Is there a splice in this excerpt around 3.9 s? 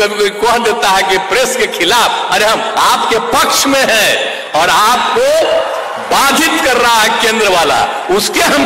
no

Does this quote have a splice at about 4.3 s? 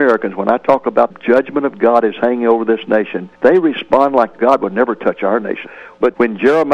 yes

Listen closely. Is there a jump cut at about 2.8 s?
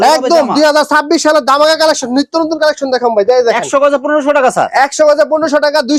no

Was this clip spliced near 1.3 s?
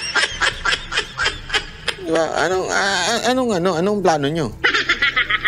yes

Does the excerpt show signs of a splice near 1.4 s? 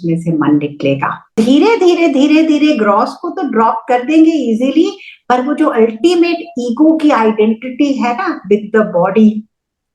yes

